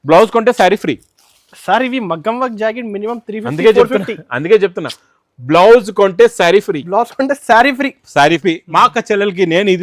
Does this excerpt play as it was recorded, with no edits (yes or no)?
no